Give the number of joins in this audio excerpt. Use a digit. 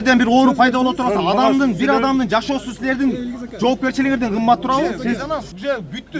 1